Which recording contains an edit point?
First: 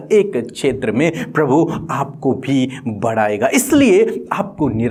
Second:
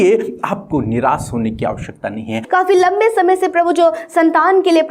second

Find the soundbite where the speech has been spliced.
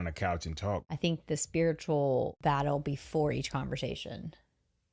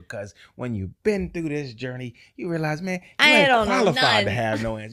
first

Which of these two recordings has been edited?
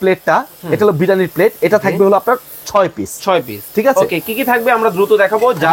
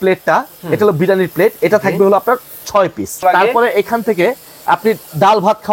second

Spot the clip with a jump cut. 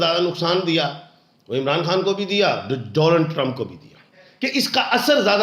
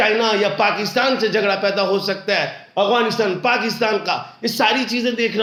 first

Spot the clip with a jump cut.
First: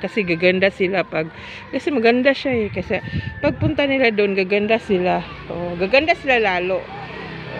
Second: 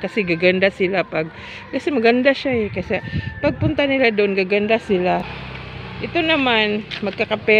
second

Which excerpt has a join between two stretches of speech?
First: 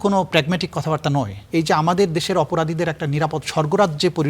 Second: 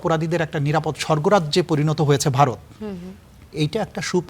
first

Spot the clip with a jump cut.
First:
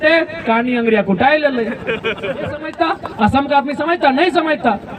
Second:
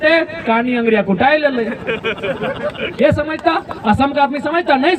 first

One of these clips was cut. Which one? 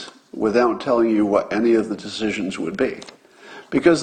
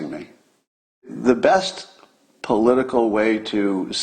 second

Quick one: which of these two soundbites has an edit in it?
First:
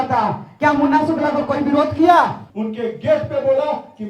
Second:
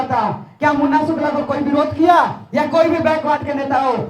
first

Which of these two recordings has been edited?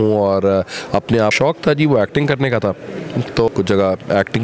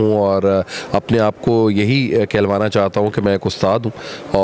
first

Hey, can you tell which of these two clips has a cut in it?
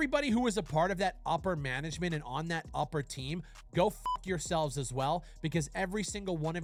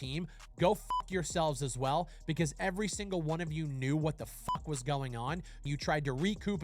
second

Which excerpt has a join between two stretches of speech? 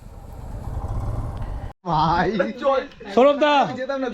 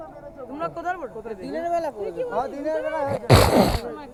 first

